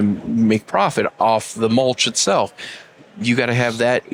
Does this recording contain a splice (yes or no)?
no